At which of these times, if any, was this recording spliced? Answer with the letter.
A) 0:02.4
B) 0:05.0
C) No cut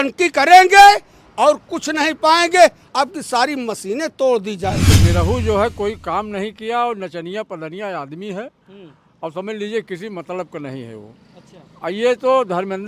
B